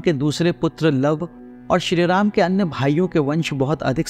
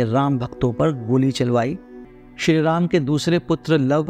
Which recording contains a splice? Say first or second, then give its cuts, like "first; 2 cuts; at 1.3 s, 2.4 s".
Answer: second; 1 cut; at 1.9 s